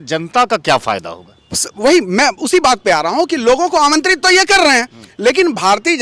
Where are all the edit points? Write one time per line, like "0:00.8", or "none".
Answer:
none